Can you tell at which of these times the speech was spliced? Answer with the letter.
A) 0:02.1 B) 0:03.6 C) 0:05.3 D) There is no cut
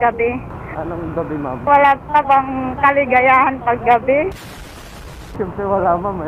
C